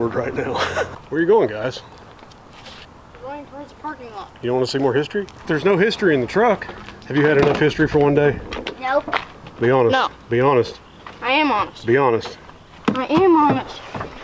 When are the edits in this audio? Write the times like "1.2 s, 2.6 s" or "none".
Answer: 1.0 s